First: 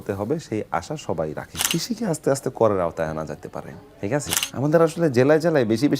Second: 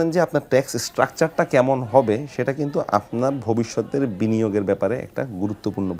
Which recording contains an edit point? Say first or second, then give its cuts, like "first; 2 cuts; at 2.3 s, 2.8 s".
first; 2 cuts; at 1.5 s, 4.4 s